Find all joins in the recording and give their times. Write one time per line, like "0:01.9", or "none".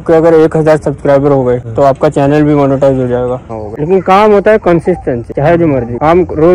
0:03.5